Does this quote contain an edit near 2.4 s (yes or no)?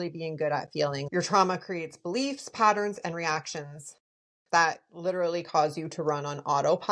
no